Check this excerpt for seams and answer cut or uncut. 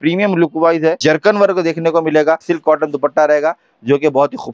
cut